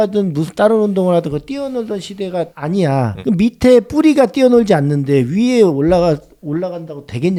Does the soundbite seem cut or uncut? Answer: uncut